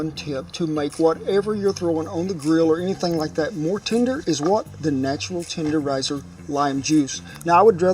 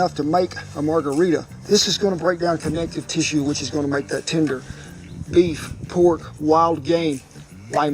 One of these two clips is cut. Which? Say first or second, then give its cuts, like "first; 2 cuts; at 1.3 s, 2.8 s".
second; 1 cut; at 5.2 s